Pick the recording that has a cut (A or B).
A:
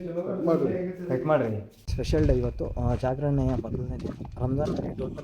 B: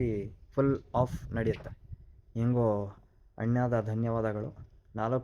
A